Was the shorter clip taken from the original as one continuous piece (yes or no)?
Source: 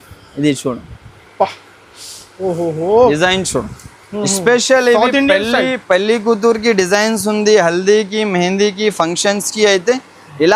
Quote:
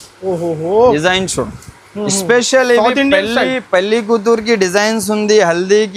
yes